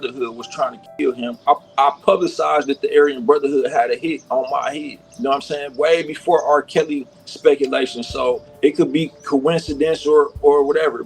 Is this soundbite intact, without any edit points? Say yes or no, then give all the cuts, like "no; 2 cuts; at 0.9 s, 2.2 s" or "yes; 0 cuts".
no; 1 cut; at 1.4 s